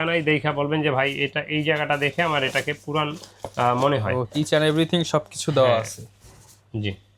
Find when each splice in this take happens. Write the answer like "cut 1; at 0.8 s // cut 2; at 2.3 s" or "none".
none